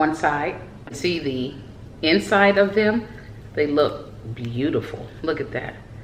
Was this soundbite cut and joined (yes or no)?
yes